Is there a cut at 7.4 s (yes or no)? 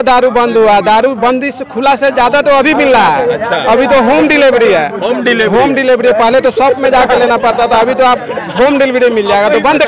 no